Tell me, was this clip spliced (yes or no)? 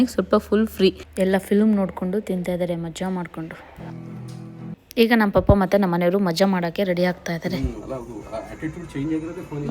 yes